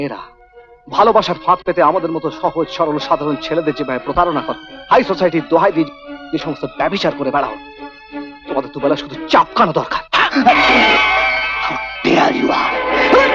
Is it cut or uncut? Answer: uncut